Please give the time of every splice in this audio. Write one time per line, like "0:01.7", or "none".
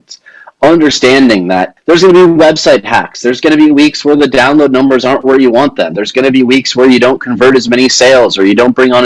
0:01.7